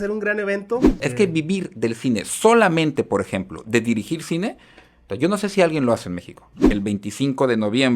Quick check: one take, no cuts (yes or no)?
no